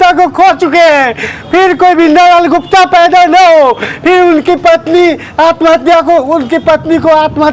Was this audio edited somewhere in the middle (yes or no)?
no